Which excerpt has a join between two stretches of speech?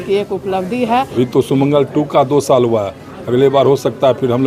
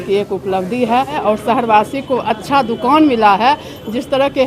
first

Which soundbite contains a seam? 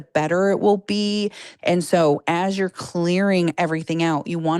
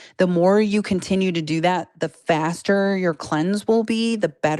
first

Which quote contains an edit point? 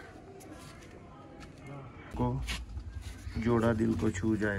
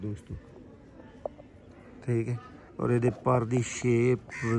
first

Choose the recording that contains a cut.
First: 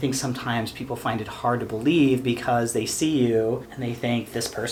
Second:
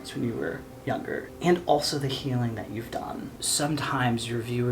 second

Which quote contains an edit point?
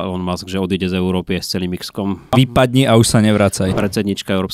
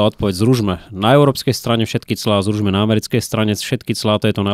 first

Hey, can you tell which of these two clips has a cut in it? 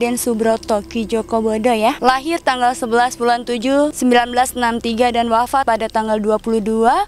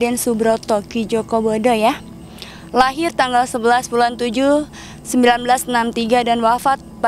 first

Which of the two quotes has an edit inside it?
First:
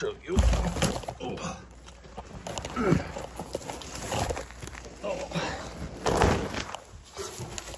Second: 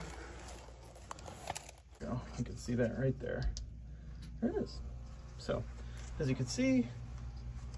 second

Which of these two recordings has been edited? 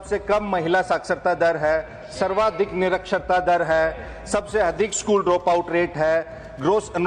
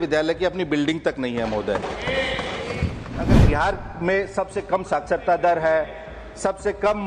second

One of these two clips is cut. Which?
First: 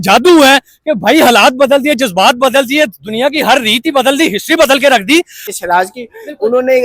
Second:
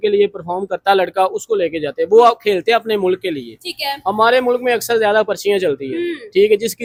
first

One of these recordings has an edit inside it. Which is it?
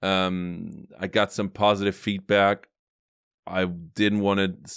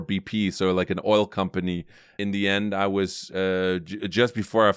second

